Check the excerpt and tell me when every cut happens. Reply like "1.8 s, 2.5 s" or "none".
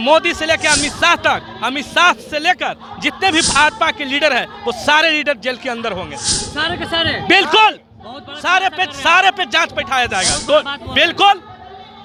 none